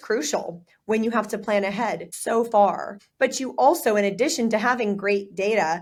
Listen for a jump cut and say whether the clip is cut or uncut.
uncut